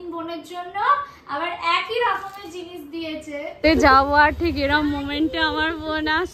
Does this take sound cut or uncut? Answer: cut